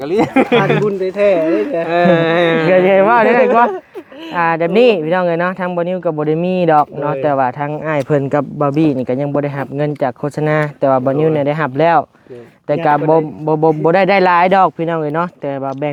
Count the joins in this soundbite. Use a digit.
0